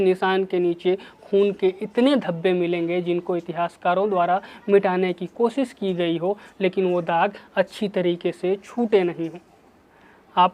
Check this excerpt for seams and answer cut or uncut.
uncut